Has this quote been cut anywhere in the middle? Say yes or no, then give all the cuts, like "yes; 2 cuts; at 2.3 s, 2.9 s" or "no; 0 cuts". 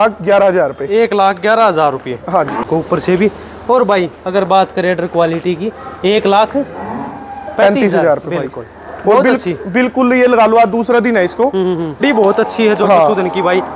yes; 2 cuts; at 2.7 s, 12.0 s